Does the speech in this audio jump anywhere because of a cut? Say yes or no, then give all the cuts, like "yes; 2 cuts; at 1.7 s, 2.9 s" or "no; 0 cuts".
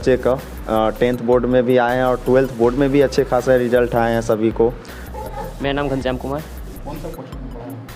yes; 1 cut; at 5.1 s